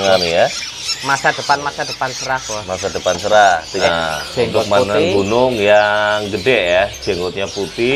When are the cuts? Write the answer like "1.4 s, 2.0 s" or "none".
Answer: 3.9 s